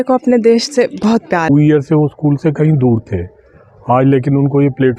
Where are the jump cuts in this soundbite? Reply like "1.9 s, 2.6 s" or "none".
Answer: 1.5 s